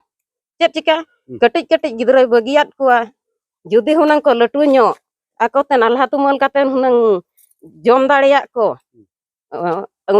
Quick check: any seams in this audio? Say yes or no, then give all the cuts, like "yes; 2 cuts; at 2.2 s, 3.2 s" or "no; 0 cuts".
no; 0 cuts